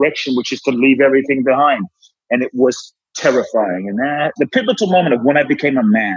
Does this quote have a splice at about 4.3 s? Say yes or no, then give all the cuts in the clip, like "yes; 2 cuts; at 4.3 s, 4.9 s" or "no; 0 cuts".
yes; 1 cut; at 4.3 s